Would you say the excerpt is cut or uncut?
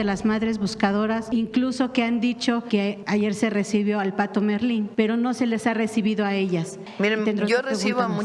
cut